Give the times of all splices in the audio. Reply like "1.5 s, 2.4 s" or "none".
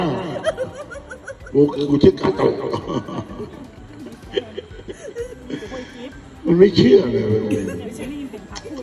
6.3 s